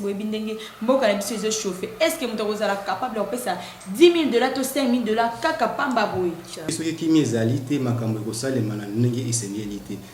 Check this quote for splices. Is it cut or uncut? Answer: cut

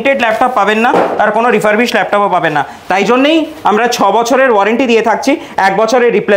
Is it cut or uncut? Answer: uncut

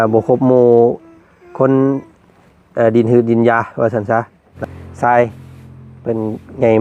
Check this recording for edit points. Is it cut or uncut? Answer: cut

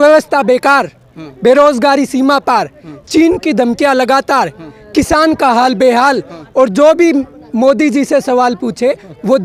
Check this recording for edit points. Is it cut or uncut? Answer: uncut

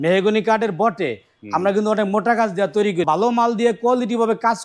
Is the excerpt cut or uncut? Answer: cut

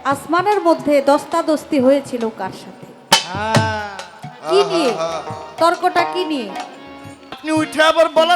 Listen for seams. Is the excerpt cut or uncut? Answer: cut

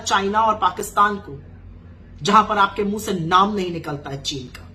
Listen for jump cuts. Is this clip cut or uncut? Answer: uncut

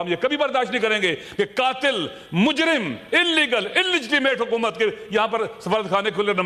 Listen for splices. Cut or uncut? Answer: uncut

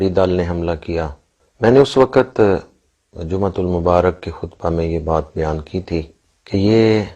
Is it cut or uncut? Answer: uncut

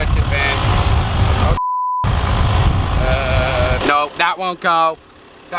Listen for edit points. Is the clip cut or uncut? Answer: uncut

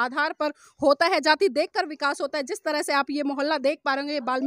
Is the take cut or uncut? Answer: uncut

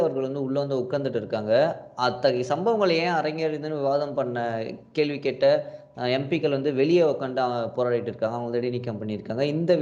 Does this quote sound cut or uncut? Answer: uncut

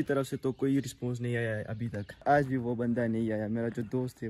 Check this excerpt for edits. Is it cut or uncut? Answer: cut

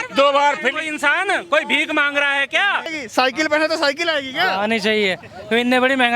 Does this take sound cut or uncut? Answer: cut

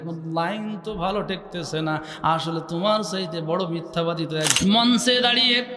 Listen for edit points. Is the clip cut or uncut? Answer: cut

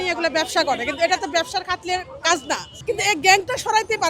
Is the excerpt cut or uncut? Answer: cut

